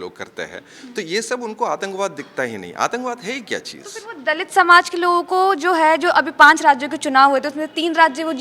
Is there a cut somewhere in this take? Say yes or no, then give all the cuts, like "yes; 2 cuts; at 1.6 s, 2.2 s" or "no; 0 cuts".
no; 0 cuts